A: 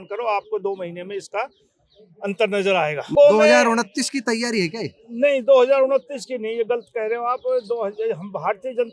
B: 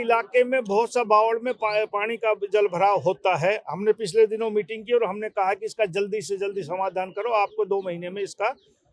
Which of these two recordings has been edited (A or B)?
A